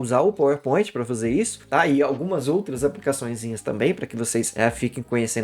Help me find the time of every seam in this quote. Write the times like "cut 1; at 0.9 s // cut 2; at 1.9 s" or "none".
none